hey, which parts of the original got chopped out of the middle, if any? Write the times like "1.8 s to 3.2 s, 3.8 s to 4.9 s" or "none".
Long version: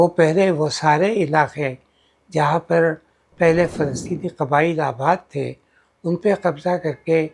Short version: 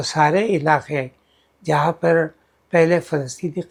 none